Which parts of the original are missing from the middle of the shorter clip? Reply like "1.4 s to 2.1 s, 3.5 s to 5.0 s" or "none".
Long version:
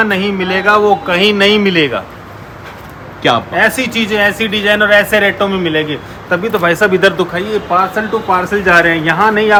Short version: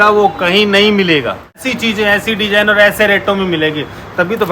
2.3 s to 3.8 s